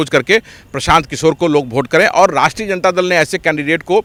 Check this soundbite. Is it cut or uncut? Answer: uncut